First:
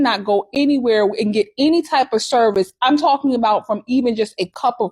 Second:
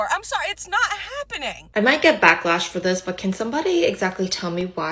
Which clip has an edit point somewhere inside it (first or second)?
second